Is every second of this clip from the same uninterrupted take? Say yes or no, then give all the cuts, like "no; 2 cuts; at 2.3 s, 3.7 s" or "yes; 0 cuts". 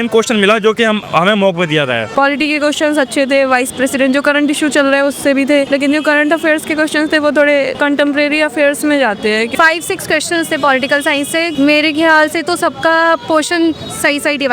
no; 5 cuts; at 2.1 s, 5.7 s, 7.7 s, 9.5 s, 11.5 s